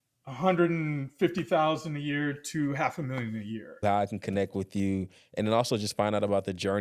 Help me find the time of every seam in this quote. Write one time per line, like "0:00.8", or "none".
0:03.8